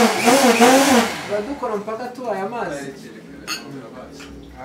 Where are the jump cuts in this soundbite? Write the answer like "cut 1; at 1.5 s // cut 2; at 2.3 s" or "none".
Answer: none